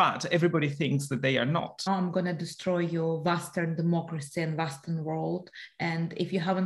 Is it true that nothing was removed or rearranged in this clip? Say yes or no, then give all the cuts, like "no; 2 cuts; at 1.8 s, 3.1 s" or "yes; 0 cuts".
no; 1 cut; at 1.8 s